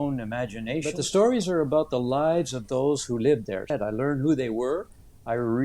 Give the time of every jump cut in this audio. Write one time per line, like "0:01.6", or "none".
0:01.0
0:03.7